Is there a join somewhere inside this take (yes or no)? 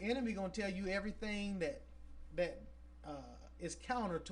no